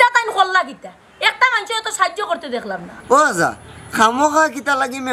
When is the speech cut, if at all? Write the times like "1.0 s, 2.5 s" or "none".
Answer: 2.9 s

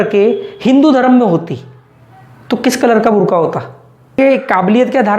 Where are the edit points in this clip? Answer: 4.2 s

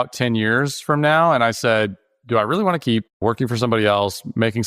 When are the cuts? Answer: 2.8 s

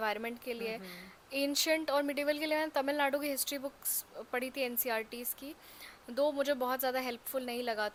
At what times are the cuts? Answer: none

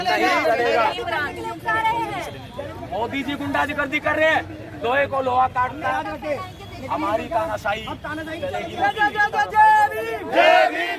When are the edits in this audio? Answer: none

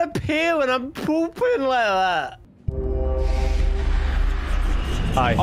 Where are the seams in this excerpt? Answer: 2.5 s

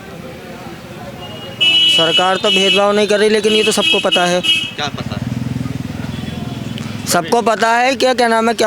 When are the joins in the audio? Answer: none

